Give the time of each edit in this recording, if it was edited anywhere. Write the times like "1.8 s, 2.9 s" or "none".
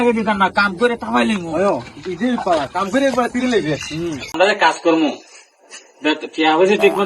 4.4 s